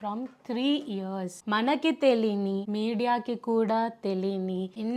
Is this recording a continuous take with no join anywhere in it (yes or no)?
yes